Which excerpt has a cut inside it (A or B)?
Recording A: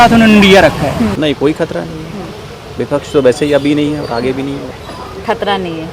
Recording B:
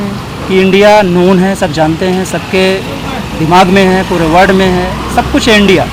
A